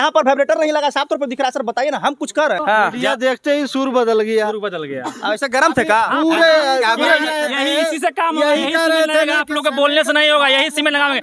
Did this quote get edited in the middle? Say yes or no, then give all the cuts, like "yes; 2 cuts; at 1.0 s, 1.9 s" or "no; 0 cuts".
yes; 1 cut; at 2.6 s